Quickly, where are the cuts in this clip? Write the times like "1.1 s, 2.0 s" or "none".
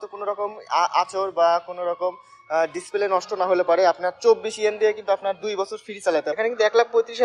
6.3 s